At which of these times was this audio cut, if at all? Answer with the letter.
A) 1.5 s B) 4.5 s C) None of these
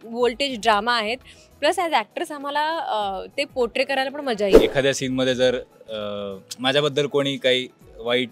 B